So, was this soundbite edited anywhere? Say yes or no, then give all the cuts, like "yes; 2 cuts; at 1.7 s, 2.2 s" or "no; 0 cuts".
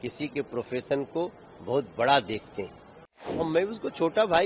yes; 1 cut; at 3.5 s